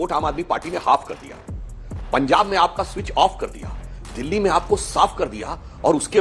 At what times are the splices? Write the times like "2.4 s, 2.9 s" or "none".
none

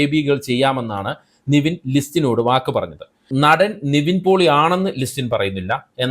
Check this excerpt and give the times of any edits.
3.2 s

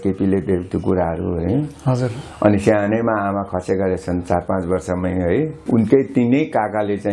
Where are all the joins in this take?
5.6 s

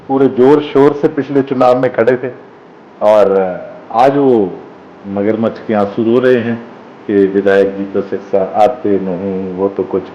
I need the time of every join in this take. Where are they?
none

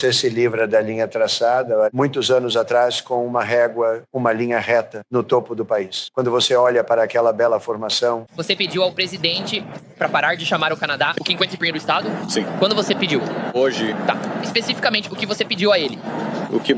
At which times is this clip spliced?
1.9 s, 8.2 s, 13.5 s

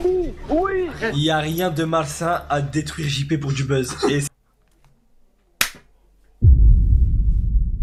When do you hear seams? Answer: none

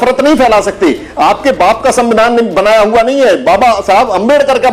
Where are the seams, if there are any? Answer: none

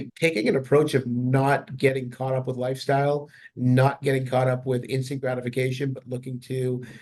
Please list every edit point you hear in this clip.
none

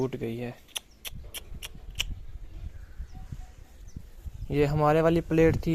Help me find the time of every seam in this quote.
none

